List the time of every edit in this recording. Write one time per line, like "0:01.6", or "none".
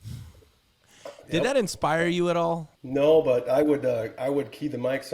0:02.7